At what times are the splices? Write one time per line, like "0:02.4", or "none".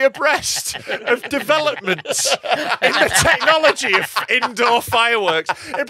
none